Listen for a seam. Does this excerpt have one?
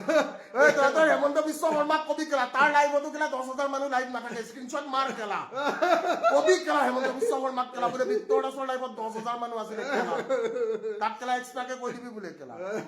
no; 0 cuts

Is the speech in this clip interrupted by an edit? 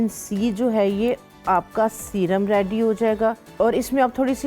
yes; 1 cut; at 3.4 s

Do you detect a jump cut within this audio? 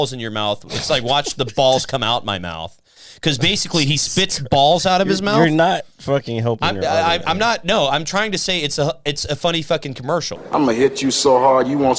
yes; 1 cut; at 10.4 s

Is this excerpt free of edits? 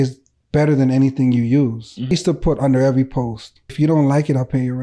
no; 2 cuts; at 2.1 s, 3.7 s

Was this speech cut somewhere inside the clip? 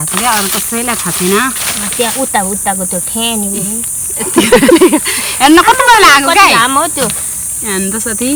no; 0 cuts

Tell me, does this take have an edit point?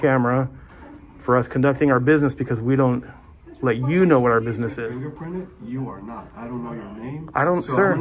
yes; 1 cut; at 4.9 s

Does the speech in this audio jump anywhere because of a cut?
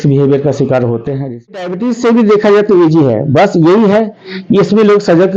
yes; 1 cut; at 1.7 s

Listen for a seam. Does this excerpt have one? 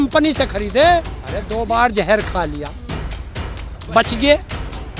yes; 1 cut; at 1.2 s

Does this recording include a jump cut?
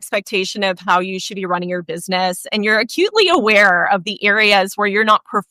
no; 0 cuts

